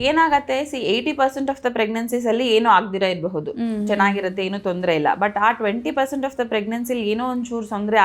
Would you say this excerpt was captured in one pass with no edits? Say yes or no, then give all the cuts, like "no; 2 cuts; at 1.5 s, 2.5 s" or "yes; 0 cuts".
yes; 0 cuts